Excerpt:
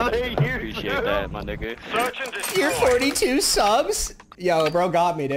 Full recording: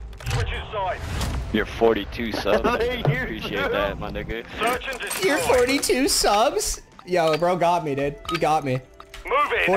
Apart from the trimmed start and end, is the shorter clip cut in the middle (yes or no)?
no